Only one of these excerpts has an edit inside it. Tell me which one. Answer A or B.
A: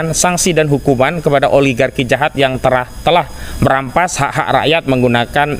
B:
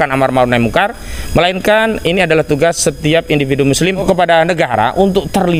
B